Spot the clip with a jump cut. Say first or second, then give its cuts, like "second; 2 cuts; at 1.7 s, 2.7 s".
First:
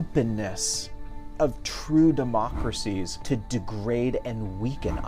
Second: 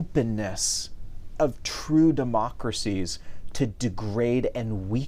first; 1 cut; at 3.1 s